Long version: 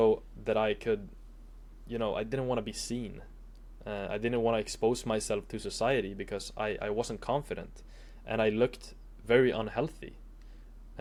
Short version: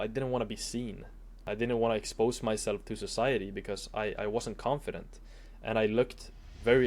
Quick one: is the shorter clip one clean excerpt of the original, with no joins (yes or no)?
no